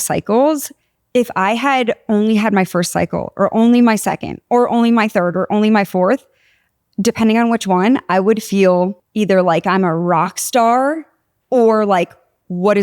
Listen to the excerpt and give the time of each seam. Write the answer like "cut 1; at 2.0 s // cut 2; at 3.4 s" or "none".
none